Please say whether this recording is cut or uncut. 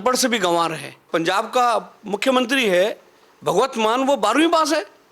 cut